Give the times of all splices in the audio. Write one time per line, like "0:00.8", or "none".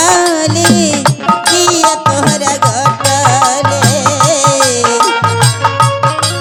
none